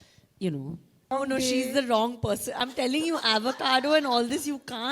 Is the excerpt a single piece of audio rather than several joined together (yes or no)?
no